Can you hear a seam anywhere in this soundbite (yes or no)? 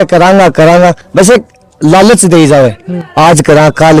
no